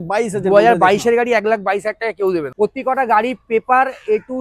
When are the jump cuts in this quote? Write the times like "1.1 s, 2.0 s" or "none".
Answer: 2.5 s